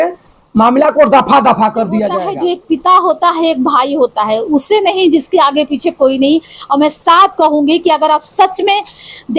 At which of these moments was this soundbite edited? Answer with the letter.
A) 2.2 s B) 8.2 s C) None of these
A